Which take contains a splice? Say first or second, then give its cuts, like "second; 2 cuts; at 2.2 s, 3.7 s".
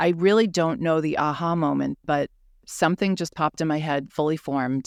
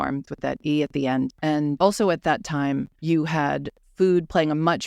second; 3 cuts; at 1.6 s, 2.9 s, 3.8 s